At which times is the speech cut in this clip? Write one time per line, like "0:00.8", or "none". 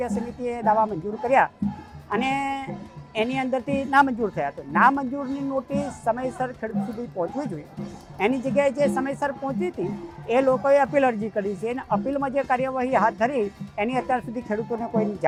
none